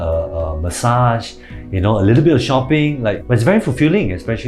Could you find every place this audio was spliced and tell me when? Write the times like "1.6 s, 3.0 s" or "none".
3.1 s